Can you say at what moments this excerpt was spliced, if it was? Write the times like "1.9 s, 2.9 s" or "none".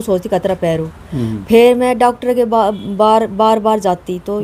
none